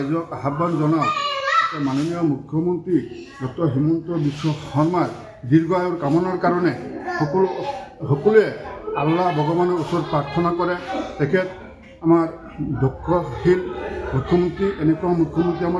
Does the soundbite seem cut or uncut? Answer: uncut